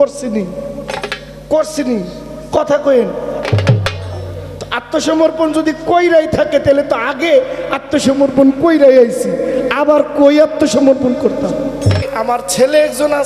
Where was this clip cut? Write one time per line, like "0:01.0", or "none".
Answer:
0:12.1